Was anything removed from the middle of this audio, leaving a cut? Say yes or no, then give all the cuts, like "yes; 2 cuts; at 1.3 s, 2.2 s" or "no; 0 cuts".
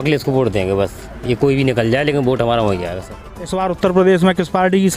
yes; 1 cut; at 3.0 s